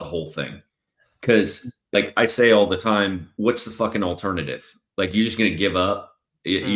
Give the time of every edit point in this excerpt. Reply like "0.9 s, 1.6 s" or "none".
1.8 s, 3.3 s